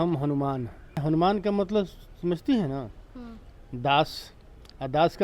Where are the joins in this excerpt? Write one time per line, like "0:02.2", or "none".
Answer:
0:01.0